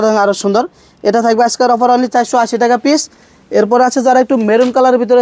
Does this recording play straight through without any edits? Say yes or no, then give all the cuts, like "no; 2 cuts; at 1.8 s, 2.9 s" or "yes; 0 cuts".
yes; 0 cuts